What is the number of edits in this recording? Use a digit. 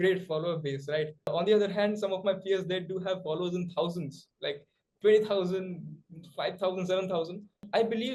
0